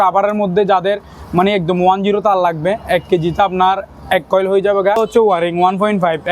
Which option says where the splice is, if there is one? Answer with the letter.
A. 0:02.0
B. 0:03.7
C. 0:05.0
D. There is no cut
C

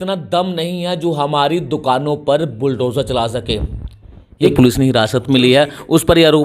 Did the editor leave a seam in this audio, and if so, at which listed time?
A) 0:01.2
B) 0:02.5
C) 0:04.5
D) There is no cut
C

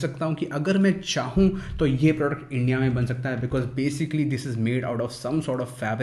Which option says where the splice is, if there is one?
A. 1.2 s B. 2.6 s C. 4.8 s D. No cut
D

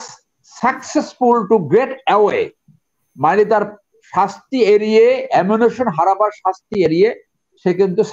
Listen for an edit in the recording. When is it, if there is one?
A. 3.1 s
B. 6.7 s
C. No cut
C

